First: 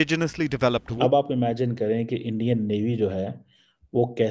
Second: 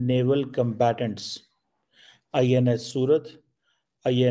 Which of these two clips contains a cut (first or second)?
first